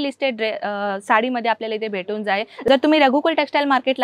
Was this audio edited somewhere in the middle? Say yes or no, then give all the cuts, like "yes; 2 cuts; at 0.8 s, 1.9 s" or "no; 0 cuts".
yes; 1 cut; at 2.7 s